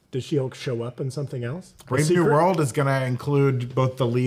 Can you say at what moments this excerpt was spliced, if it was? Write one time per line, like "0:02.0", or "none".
0:01.7